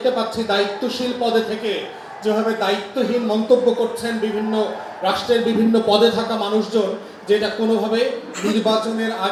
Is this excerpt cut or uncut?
uncut